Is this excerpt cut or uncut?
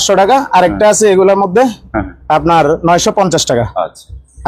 uncut